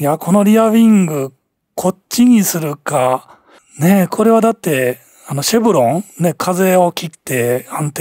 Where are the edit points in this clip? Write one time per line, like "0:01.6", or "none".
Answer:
none